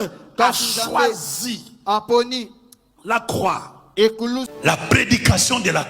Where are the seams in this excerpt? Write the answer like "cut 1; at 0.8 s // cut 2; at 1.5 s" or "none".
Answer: cut 1; at 4.4 s